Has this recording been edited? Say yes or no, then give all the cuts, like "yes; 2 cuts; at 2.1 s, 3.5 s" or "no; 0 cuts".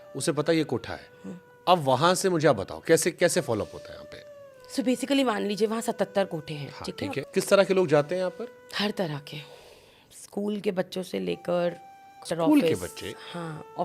yes; 2 cuts; at 7.2 s, 12.2 s